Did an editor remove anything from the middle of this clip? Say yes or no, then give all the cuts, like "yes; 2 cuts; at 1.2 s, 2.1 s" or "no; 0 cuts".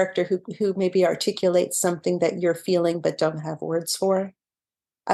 no; 0 cuts